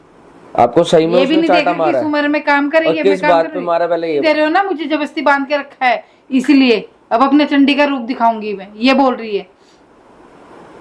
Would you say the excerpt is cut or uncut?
cut